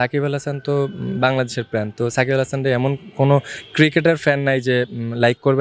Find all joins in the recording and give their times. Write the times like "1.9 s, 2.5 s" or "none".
none

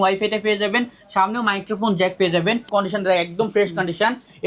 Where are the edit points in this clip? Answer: 2.7 s

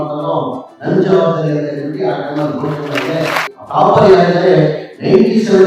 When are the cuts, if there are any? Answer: 3.6 s

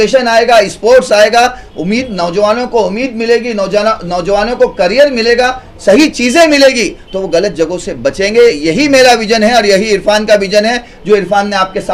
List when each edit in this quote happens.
none

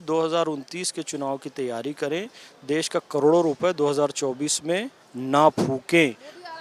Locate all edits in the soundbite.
none

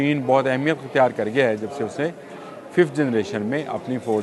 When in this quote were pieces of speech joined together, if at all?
none

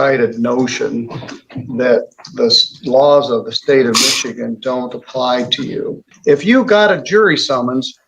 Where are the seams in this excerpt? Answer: 6.0 s

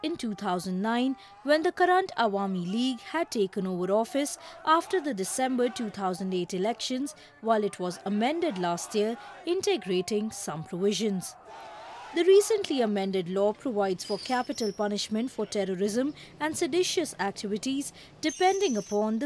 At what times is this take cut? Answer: 7.0 s

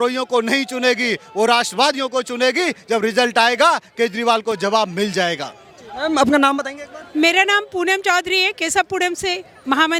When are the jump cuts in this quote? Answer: none

